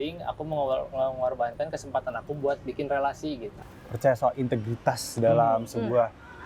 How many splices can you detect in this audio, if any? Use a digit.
1